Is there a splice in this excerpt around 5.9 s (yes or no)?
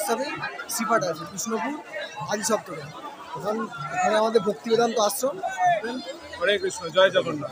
yes